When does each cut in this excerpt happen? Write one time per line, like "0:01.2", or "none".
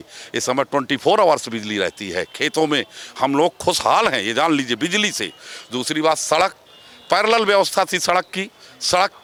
none